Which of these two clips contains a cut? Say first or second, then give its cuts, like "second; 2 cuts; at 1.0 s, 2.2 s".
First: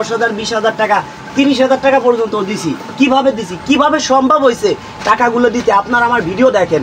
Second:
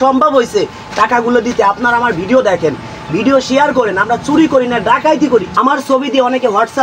second; 1 cut; at 5.5 s